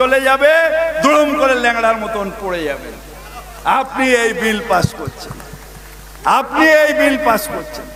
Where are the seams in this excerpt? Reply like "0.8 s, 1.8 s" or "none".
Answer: none